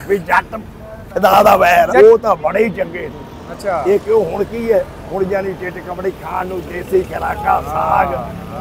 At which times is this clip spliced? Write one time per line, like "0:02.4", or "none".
0:01.9